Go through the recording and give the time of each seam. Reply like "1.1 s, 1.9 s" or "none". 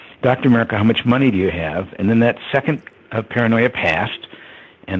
1.1 s